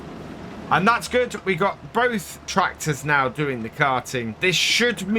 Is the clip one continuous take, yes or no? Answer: no